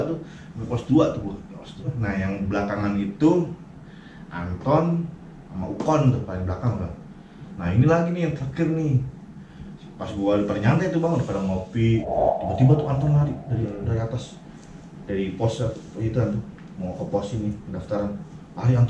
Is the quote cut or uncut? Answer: cut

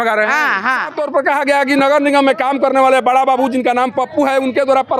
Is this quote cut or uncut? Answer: cut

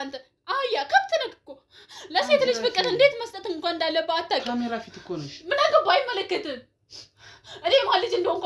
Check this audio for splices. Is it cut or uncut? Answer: uncut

